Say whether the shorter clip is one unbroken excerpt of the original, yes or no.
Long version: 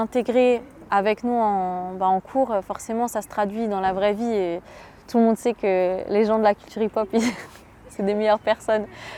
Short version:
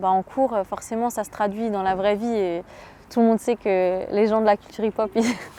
yes